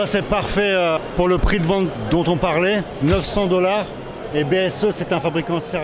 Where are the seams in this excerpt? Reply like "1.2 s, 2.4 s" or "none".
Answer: 1.0 s, 2.0 s, 2.9 s